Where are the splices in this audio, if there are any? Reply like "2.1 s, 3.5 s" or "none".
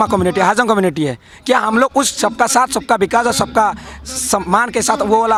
none